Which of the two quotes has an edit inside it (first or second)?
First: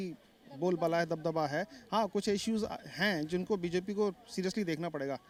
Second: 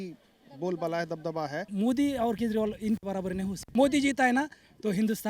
second